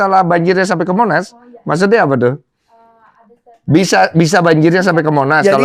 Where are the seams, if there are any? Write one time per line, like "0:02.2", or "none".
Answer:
none

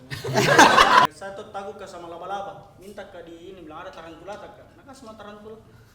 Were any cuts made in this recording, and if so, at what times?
0:01.1

